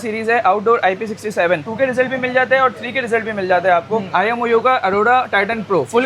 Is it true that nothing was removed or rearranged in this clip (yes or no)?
no